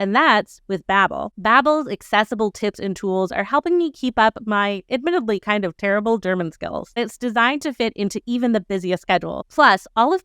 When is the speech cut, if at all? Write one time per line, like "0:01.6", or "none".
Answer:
0:01.2
0:07.0
0:09.4

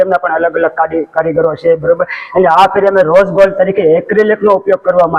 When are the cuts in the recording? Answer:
none

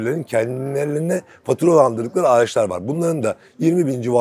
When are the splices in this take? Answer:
none

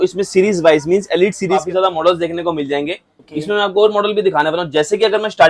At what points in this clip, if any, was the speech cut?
0:01.6

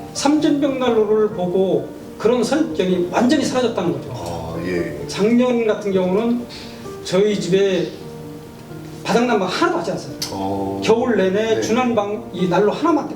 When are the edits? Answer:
0:05.0

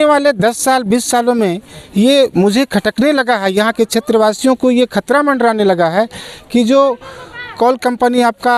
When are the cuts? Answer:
none

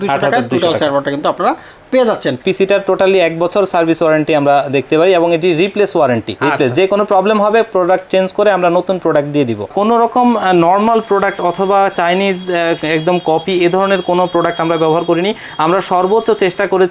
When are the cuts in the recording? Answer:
0:02.4
0:06.3
0:09.7

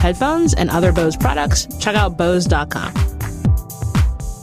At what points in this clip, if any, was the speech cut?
0:03.4

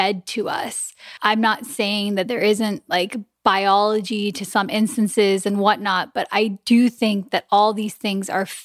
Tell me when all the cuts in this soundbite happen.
0:00.9

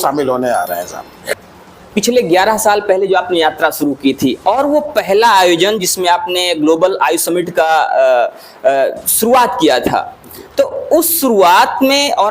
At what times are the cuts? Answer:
0:01.2

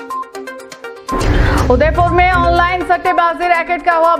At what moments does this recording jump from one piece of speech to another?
none

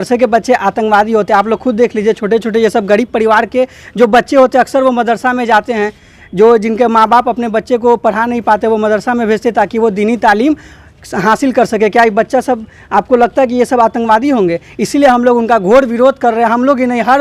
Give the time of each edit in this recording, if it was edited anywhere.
none

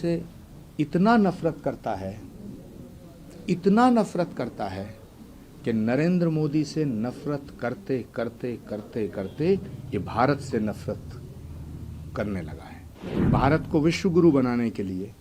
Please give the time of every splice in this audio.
0:13.1

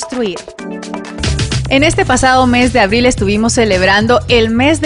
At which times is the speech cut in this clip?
0:01.1

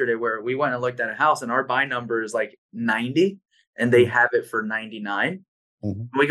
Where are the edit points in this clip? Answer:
none

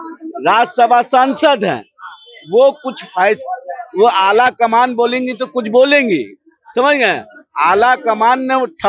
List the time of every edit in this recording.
none

